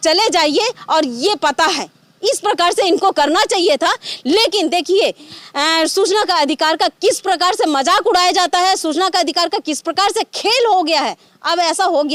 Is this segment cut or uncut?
uncut